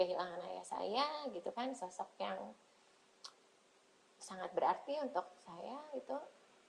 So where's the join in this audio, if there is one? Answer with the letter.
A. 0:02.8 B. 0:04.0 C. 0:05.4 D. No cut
D